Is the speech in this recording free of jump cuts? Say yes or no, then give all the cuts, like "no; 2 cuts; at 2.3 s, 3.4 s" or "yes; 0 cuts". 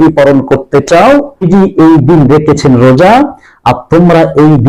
no; 1 cut; at 1.0 s